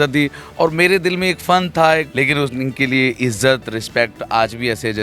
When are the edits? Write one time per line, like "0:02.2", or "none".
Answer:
0:02.1